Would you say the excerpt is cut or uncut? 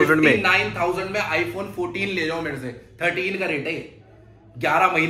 uncut